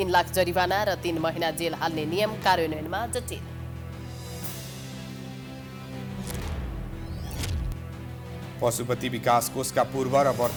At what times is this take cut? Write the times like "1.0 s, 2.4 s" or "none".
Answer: none